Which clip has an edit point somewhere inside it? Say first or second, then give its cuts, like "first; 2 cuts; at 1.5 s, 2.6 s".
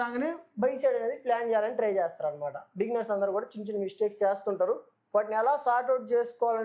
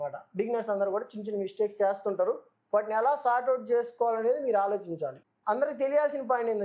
second; 1 cut; at 5.1 s